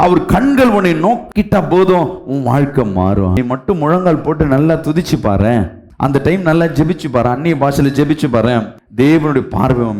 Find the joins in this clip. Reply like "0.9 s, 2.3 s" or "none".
3.3 s

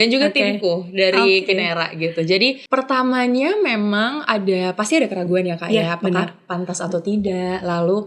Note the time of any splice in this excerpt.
2.6 s

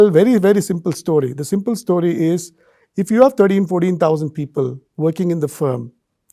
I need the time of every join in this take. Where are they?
none

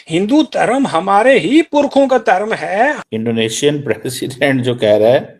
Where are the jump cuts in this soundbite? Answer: 3.0 s

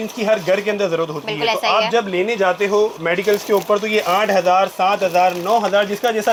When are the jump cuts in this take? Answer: none

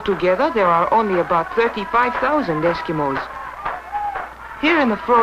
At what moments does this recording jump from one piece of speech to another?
1.9 s

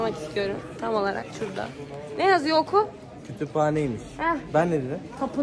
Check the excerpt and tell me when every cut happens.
none

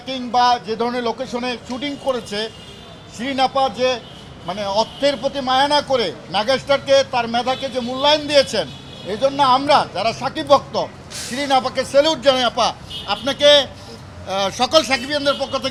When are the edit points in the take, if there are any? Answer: none

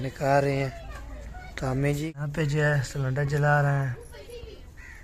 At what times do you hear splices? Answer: 2.0 s

